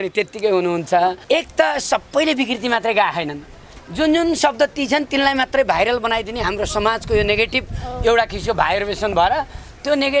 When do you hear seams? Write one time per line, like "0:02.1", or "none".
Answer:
0:01.2